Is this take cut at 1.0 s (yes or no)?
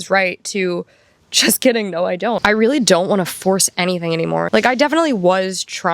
no